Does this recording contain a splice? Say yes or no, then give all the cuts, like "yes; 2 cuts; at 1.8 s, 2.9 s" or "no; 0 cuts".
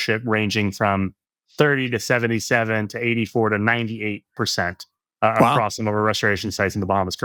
no; 0 cuts